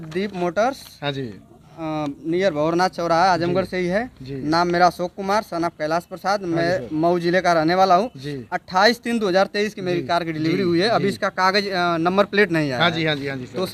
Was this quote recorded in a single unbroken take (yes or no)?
yes